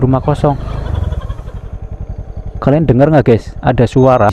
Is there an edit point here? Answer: no; 0 cuts

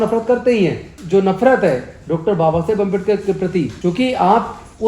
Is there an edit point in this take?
yes; 2 cuts; at 0.9 s, 3.7 s

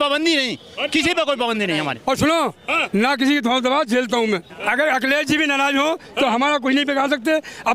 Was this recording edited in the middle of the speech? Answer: yes; 2 cuts; at 2.0 s, 4.5 s

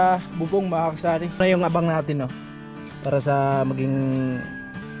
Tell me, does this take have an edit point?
yes; 1 cut; at 1.4 s

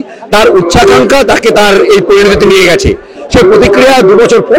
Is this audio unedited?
no; 1 cut; at 3.2 s

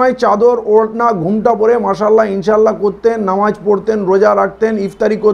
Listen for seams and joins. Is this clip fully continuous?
yes; 0 cuts

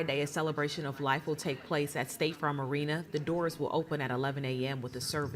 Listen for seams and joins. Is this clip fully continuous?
no; 1 cut; at 2.1 s

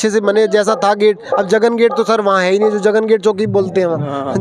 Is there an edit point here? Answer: no; 0 cuts

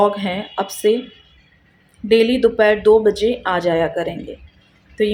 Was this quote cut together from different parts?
no; 0 cuts

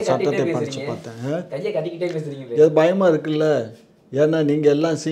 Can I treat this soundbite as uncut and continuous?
yes; 0 cuts

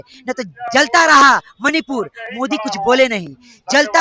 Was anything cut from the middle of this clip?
no; 0 cuts

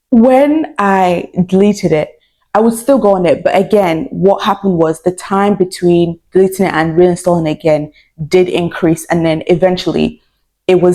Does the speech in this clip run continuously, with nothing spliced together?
yes; 0 cuts

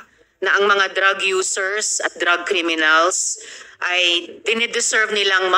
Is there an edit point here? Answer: no; 0 cuts

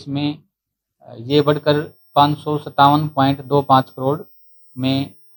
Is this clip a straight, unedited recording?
yes; 0 cuts

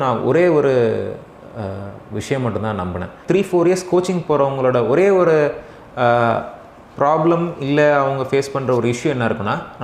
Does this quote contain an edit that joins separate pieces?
yes; 1 cut; at 3.2 s

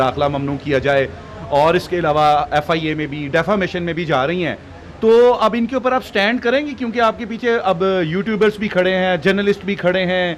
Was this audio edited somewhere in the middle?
no; 0 cuts

